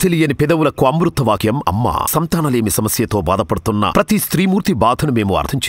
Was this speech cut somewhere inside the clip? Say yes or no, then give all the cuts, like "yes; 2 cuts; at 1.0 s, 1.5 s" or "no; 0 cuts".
no; 0 cuts